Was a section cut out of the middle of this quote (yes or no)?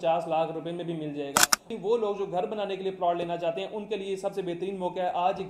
yes